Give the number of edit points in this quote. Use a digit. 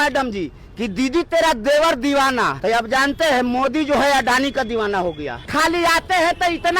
2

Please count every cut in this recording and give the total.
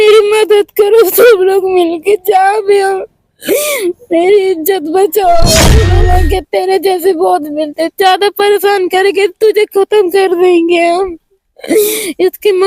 1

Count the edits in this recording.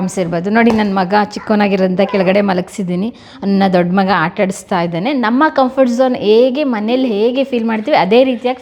0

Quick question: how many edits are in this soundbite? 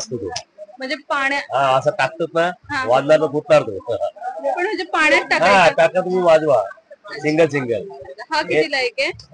0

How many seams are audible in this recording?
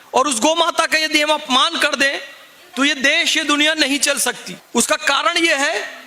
1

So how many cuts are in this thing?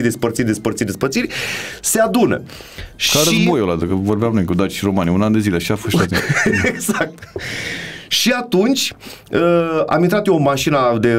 0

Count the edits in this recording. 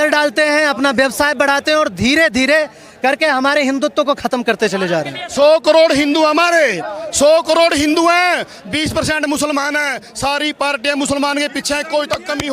1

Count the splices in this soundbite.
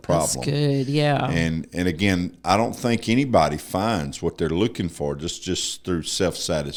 0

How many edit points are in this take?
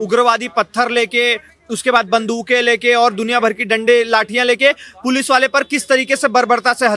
0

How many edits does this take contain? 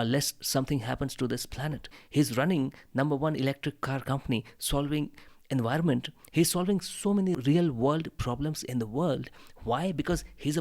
2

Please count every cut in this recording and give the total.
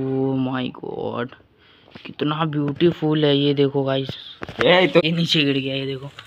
1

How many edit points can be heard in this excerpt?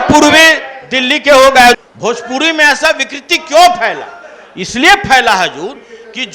1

